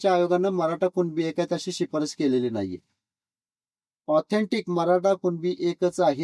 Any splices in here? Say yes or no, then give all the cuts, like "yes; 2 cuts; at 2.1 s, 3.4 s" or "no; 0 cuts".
no; 0 cuts